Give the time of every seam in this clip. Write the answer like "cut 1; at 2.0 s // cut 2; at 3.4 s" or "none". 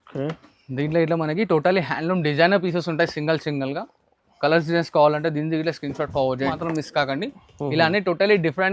cut 1; at 6.5 s